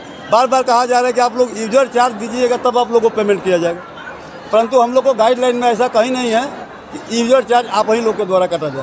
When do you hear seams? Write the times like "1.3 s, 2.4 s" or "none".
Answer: none